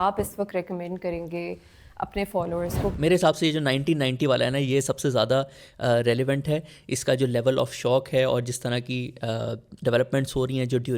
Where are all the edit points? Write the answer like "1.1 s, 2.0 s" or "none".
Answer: 2.9 s